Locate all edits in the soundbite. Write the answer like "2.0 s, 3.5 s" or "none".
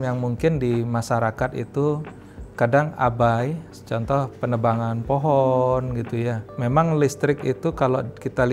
3.6 s, 6.5 s